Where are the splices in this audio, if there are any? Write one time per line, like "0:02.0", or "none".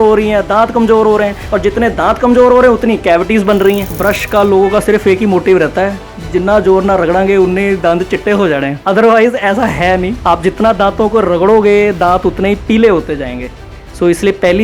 0:04.0
0:08.7
0:10.1